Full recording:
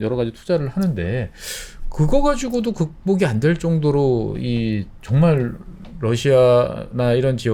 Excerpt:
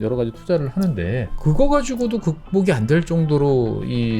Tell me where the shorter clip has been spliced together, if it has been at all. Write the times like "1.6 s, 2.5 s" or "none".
1.3 s